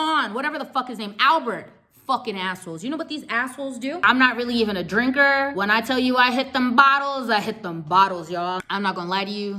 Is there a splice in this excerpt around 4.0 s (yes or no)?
yes